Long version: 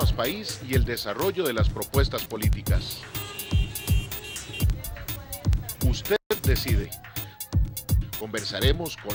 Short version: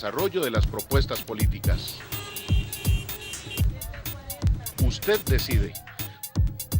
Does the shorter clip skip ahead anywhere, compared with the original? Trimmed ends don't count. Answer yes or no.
yes